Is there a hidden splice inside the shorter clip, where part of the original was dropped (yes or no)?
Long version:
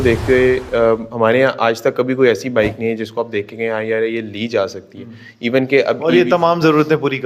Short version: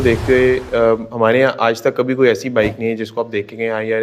no